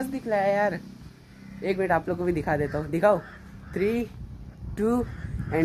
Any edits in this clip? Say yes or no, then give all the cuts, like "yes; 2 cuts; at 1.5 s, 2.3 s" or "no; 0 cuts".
no; 0 cuts